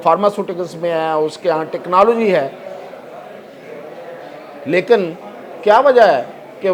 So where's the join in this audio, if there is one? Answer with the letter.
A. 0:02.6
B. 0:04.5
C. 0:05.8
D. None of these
D